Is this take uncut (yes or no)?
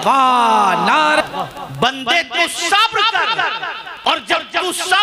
no